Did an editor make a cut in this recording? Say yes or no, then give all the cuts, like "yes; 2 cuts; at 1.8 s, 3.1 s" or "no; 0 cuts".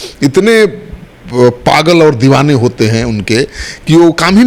no; 0 cuts